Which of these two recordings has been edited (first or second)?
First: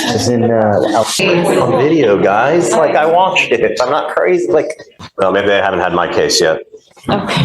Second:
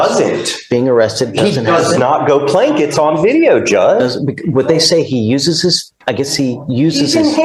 first